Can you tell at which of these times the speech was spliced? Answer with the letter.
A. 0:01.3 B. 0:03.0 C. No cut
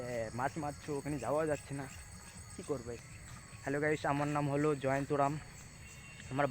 B